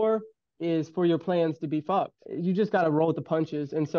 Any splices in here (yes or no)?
yes